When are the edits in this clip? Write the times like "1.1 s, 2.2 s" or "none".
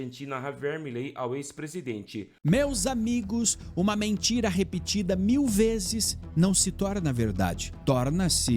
2.2 s